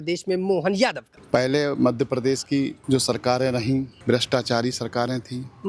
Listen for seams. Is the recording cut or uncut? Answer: cut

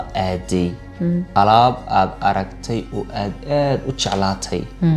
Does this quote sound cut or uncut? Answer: uncut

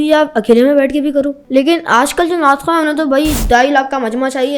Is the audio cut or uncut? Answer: cut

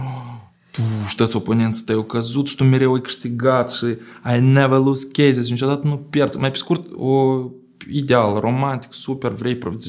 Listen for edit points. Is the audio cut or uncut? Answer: uncut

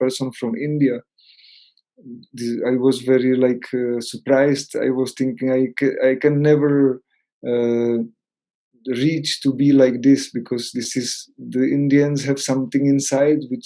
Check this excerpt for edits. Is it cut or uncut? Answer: uncut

